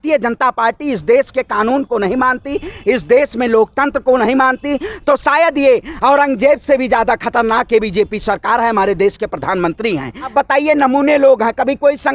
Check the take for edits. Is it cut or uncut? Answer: cut